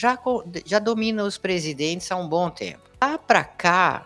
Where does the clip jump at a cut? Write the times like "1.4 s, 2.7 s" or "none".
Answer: 3.0 s